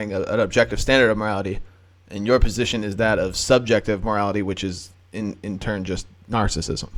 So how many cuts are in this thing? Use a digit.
0